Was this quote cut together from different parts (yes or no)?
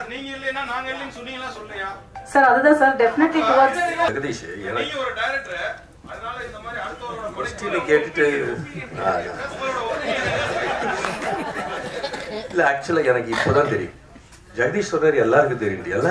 yes